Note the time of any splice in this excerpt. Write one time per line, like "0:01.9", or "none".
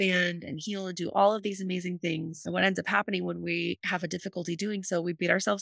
none